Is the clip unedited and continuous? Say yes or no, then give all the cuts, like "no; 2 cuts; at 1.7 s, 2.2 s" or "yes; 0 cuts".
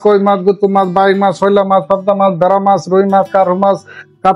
yes; 0 cuts